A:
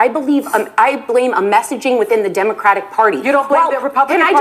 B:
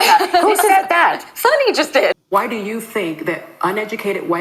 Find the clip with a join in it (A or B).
B